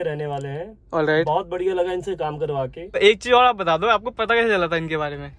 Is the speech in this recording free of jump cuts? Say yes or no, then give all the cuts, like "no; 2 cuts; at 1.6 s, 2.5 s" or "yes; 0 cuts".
no; 1 cut; at 3.0 s